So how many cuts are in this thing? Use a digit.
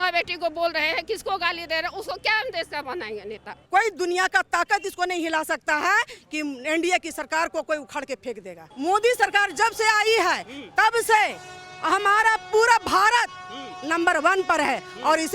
2